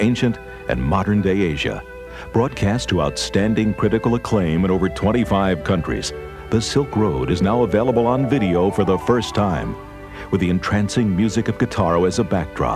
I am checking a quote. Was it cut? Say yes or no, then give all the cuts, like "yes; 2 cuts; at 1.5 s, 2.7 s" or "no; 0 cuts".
no; 0 cuts